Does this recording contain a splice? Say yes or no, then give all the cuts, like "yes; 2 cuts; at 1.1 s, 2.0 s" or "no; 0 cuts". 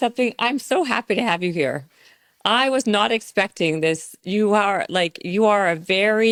no; 0 cuts